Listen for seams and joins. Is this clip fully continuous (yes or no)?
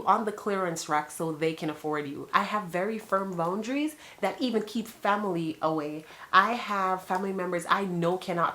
no